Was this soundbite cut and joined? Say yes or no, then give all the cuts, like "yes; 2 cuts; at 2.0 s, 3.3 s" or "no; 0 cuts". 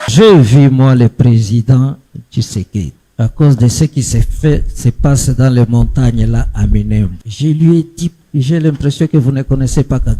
yes; 3 cuts; at 3.0 s, 7.2 s, 8.2 s